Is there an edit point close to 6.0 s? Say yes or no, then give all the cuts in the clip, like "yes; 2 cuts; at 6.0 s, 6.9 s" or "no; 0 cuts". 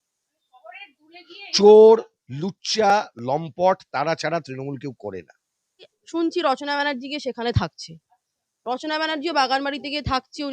yes; 1 cut; at 6.0 s